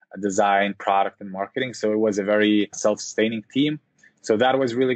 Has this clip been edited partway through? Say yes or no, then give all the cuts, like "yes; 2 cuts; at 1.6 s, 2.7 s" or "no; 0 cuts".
yes; 1 cut; at 2.7 s